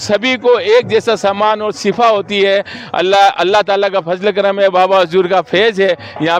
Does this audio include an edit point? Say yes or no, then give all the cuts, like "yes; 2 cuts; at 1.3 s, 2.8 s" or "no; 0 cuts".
no; 0 cuts